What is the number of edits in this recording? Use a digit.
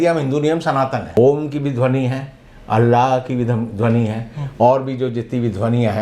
1